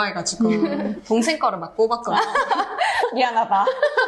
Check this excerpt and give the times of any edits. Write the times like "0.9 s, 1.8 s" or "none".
3.0 s